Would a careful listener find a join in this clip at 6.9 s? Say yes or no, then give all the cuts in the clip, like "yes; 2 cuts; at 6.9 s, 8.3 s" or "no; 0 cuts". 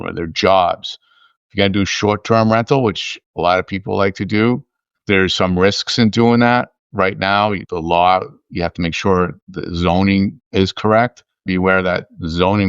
no; 1 cut; at 11.4 s